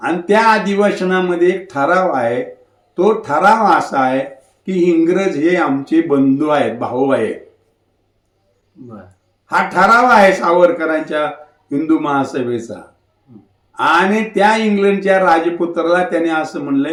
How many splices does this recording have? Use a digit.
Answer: 0